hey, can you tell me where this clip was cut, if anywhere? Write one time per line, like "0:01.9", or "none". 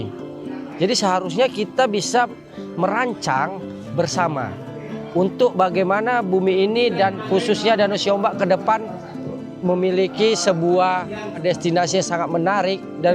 0:11.4